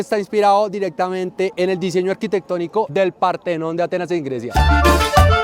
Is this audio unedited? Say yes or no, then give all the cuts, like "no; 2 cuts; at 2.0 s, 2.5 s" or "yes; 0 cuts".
yes; 0 cuts